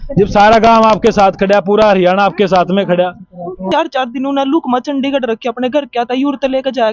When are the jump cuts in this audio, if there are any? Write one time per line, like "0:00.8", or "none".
0:03.7